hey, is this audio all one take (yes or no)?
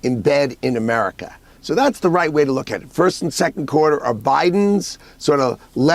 no